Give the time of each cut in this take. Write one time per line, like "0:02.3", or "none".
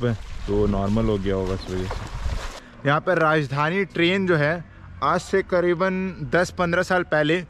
0:02.6